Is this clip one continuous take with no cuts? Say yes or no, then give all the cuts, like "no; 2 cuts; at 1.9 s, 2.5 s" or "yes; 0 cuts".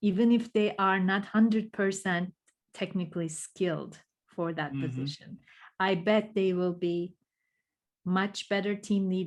yes; 0 cuts